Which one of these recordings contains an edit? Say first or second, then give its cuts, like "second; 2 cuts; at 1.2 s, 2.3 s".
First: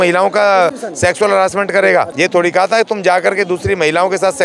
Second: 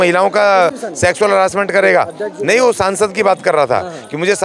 first; 1 cut; at 2.1 s